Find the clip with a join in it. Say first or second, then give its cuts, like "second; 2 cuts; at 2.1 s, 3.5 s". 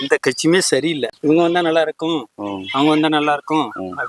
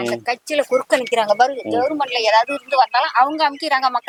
first; 1 cut; at 1.1 s